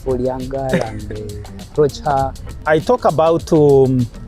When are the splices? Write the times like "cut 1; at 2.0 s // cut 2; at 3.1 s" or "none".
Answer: cut 1; at 2.6 s